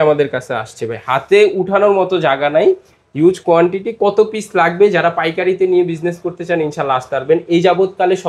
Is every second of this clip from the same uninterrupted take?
yes; 0 cuts

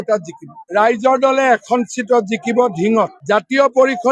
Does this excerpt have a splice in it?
no; 0 cuts

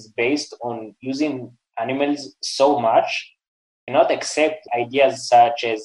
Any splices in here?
no; 0 cuts

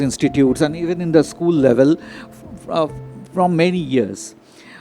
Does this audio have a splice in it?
no; 0 cuts

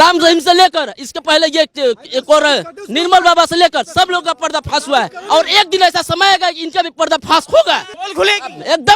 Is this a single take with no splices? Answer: no; 1 cut; at 8.0 s

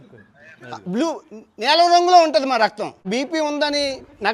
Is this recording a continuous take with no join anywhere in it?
no; 1 cut; at 3.1 s

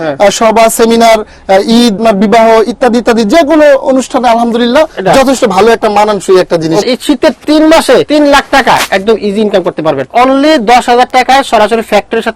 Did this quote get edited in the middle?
yes; 4 cuts; at 2.0 s, 6.8 s, 8.1 s, 10.1 s

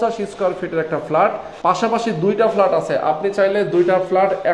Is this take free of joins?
no; 1 cut; at 1.5 s

